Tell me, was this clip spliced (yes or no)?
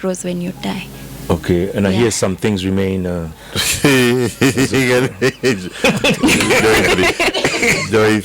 no